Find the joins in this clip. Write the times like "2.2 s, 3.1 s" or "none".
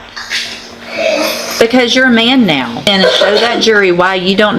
2.9 s